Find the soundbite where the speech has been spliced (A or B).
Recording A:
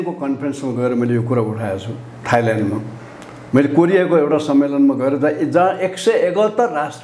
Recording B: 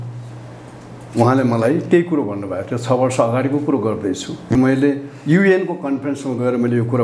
B